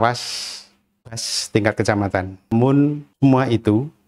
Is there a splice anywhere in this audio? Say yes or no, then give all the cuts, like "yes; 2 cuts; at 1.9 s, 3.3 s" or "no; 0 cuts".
yes; 2 cuts; at 2.4 s, 3.1 s